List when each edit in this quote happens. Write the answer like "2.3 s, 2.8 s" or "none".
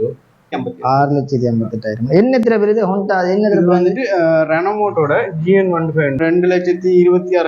6.2 s